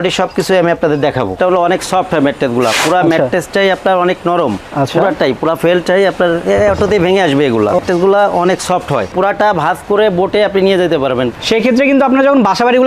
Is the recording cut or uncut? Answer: cut